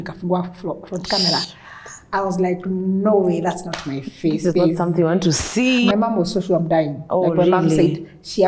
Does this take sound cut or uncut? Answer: cut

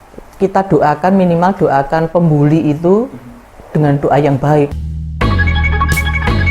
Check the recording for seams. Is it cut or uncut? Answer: cut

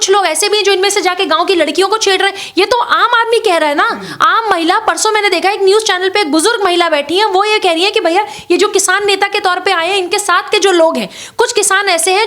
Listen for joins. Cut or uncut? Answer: uncut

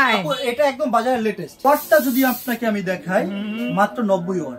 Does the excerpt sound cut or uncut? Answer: cut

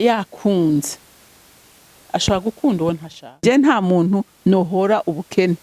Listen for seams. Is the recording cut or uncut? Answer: cut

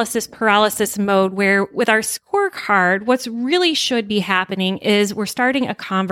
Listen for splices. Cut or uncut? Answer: uncut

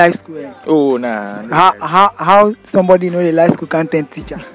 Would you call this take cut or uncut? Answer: uncut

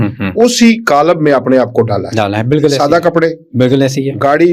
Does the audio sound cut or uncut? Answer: uncut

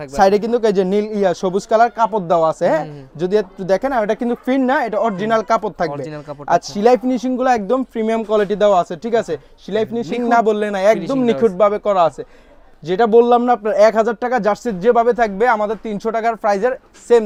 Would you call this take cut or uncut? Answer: uncut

